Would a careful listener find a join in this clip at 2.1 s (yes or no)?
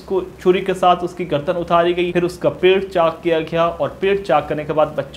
yes